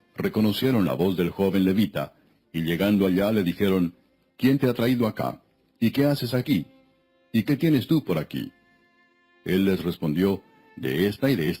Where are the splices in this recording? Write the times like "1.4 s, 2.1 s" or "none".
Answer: 2.1 s